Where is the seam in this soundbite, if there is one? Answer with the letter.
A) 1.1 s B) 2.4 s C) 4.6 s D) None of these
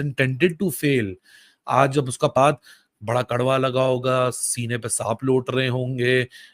B